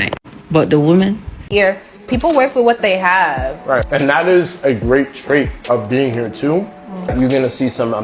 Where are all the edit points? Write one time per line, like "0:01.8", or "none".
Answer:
0:01.3